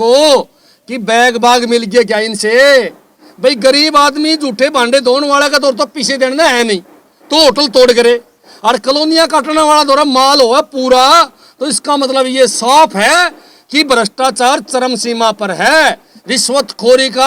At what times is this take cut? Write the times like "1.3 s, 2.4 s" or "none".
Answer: none